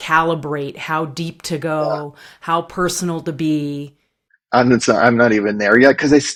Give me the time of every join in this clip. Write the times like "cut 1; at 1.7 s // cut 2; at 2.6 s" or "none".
none